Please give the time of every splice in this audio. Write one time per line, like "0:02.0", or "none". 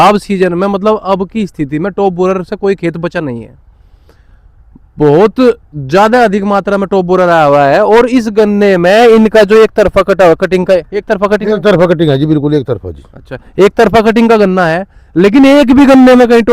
none